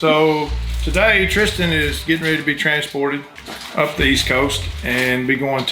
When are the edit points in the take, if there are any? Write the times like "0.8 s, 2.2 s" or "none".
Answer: none